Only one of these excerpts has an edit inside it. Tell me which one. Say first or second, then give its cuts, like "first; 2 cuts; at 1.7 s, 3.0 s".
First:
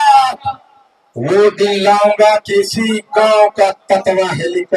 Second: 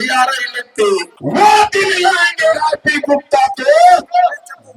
second; 1 cut; at 1.2 s